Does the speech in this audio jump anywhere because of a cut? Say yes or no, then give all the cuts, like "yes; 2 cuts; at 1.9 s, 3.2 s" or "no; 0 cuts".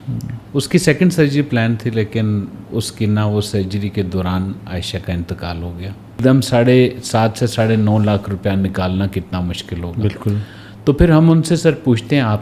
yes; 1 cut; at 6.2 s